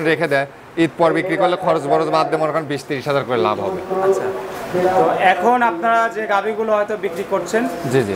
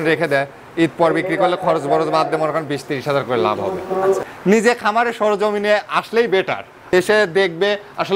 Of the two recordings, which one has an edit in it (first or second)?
second